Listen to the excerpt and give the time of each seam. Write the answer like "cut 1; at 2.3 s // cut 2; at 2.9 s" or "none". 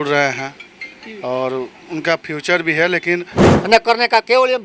cut 1; at 3.4 s